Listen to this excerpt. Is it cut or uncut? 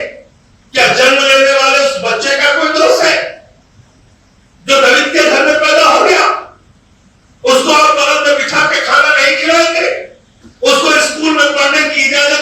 uncut